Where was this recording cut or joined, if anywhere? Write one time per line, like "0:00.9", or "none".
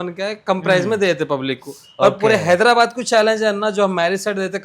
none